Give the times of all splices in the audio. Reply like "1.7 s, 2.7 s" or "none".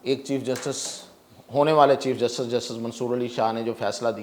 none